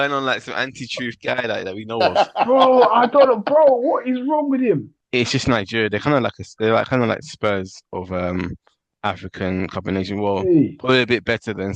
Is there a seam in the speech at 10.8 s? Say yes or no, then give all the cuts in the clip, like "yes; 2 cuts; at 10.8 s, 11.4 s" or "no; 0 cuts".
no; 1 cut; at 4.9 s